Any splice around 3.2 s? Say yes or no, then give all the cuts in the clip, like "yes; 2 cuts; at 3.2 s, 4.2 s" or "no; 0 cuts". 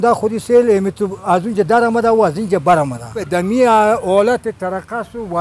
yes; 1 cut; at 3.2 s